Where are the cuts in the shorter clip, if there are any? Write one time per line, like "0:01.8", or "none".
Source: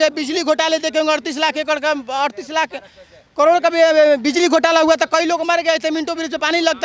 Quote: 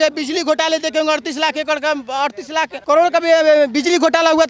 0:02.8